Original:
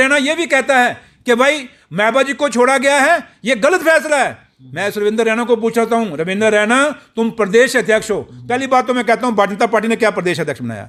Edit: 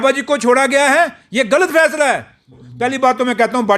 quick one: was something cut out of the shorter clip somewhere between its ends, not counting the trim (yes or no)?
yes